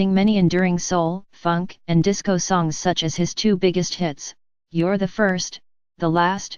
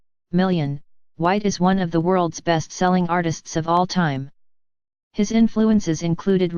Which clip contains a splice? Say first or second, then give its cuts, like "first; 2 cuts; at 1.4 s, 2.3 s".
first; 1 cut; at 4.2 s